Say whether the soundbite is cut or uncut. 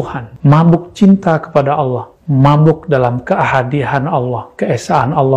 uncut